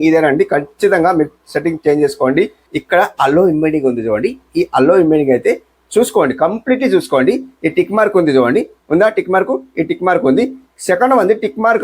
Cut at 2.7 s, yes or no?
yes